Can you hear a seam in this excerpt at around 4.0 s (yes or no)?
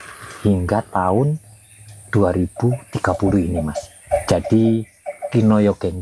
yes